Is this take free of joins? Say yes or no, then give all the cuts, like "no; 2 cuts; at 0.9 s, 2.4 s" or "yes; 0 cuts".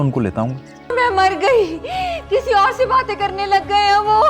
no; 1 cut; at 0.9 s